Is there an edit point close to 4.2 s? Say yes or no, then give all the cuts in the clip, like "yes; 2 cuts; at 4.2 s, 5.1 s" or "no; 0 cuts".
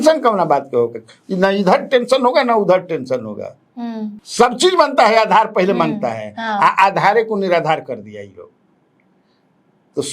yes; 1 cut; at 4.2 s